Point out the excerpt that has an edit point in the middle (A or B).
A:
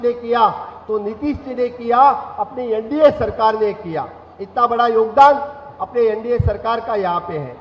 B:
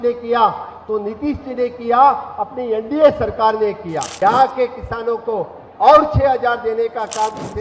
B